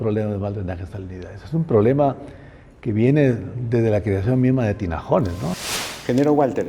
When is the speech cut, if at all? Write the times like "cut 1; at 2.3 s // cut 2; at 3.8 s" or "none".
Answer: cut 1; at 5.7 s